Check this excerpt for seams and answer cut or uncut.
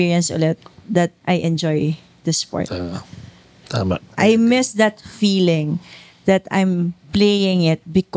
cut